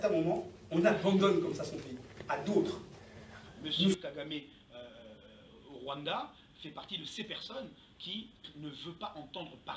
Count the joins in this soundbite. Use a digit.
1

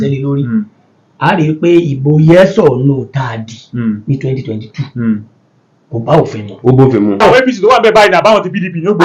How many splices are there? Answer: 1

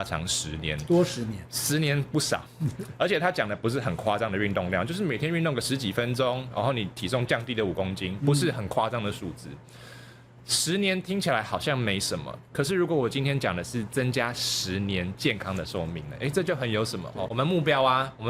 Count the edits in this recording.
1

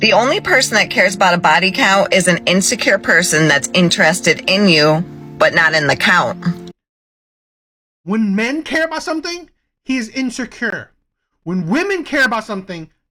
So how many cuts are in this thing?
0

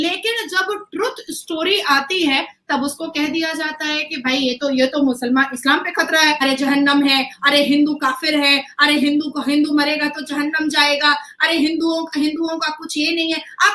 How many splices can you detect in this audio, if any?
1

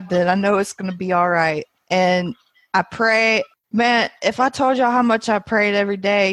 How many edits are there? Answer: 2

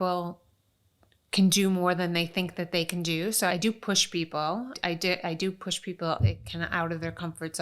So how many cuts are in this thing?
2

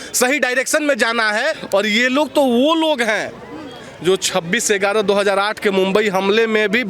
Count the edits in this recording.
1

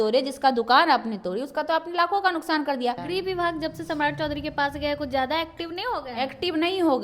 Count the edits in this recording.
1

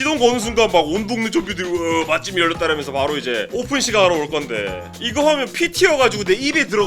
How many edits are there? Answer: 2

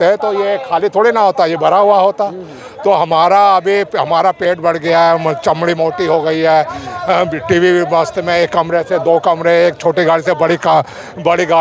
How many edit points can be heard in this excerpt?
0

